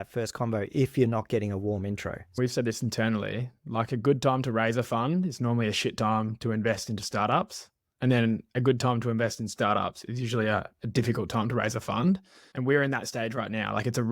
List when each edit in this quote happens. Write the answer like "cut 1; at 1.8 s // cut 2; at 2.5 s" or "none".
cut 1; at 2.3 s